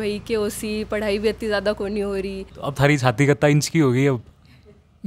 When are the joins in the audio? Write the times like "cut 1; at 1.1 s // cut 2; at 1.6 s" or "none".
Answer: cut 1; at 2.5 s